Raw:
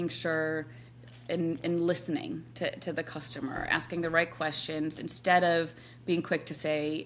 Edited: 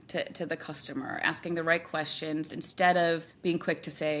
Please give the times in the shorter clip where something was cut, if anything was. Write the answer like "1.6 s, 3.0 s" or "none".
3.3 s

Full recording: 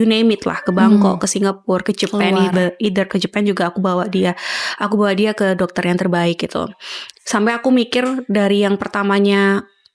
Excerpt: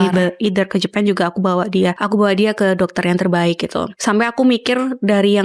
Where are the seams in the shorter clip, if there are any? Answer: 2.0 s, 3.9 s

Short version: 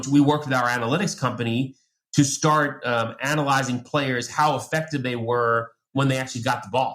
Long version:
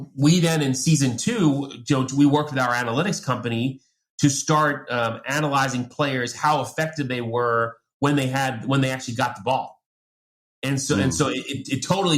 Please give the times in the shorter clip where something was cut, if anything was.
5.8 s

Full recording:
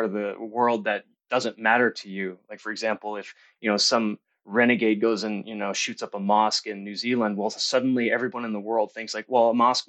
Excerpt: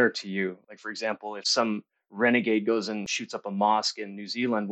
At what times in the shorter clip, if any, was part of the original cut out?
1.5 s, 3.2 s

